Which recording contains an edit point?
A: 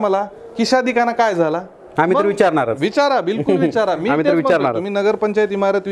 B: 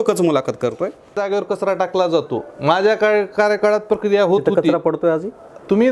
B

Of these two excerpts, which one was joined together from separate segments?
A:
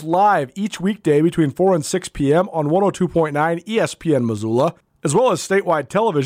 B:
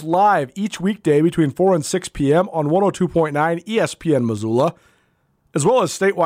A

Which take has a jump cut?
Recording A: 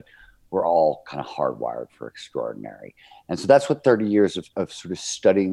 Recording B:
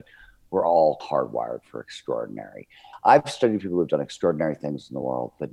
B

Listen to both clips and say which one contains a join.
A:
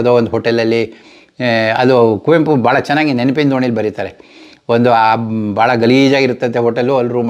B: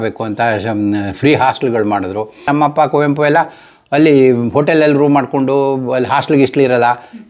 B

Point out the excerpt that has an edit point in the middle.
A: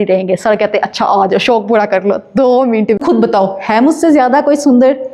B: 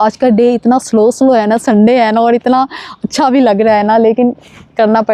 A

